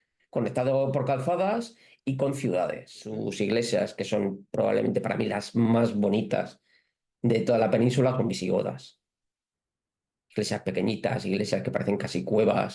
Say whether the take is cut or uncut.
cut